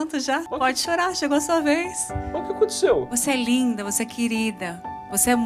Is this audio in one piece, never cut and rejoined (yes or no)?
yes